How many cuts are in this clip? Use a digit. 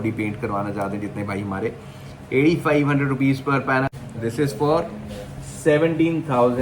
1